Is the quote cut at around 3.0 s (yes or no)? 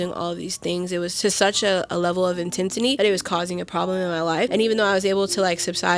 yes